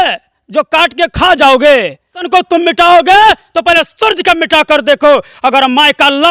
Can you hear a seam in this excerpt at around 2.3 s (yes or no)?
yes